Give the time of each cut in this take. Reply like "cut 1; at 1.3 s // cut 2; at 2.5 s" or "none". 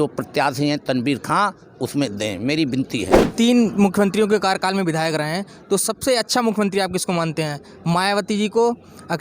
cut 1; at 3.2 s